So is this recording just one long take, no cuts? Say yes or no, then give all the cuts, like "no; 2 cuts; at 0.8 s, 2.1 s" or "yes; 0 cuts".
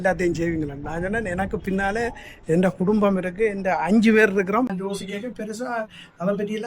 no; 1 cut; at 4.7 s